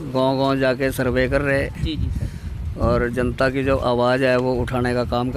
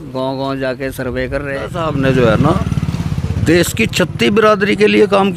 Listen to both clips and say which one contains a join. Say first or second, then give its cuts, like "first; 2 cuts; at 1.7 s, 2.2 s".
second; 1 cut; at 1.8 s